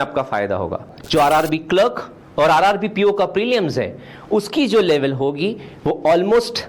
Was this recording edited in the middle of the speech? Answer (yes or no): yes